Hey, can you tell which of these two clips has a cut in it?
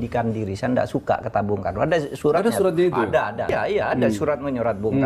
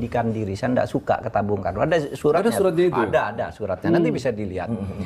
first; 1 cut; at 3.5 s

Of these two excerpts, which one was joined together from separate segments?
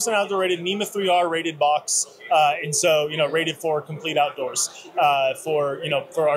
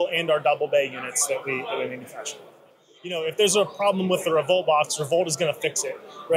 second; 1 cut; at 3.2 s

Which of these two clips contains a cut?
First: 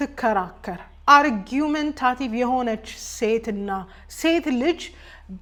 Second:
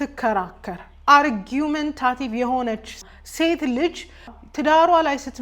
second; 2 cuts; at 3.0 s, 4.4 s

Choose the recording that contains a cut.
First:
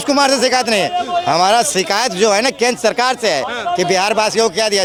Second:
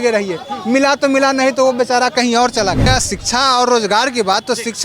second; 1 cut; at 2.9 s

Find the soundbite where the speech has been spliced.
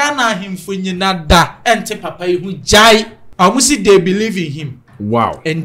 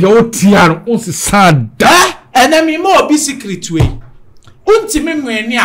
first; 1 cut; at 3.2 s

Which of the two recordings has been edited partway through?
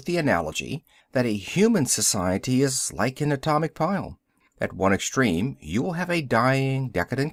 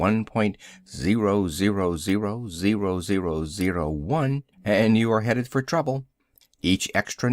second; 1 cut; at 3.8 s

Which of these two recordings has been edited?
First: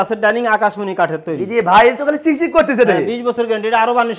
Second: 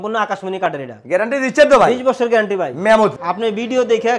second; 1 cut; at 3.2 s

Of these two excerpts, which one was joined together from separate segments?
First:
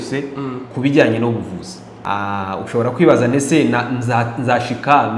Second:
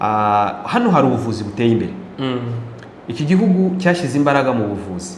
first; 1 cut; at 1.9 s

